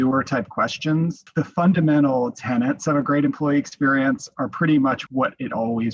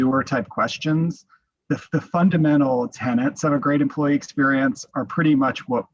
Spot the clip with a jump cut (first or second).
first